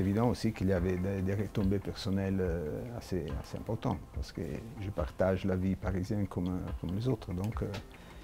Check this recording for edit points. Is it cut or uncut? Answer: uncut